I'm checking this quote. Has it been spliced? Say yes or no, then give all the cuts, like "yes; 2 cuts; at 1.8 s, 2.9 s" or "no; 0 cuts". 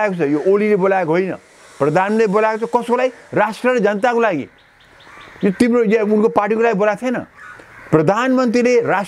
no; 0 cuts